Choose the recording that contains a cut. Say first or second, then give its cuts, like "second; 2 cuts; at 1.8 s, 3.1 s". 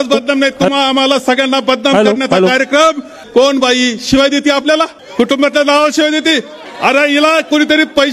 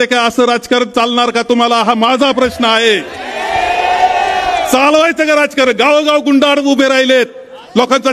first; 3 cuts; at 3.2 s, 5.0 s, 6.6 s